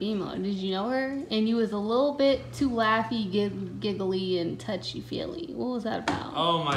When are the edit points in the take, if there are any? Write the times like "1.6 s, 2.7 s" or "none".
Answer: none